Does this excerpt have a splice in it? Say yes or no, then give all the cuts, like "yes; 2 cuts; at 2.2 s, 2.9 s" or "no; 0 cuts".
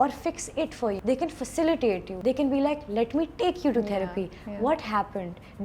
yes; 2 cuts; at 1.0 s, 2.1 s